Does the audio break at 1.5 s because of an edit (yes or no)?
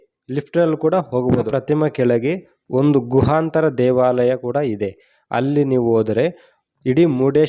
yes